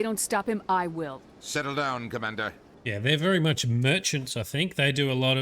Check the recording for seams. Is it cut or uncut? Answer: cut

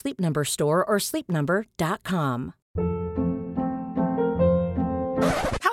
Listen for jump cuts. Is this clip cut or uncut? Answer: cut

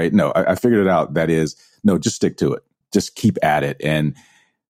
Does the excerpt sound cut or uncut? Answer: cut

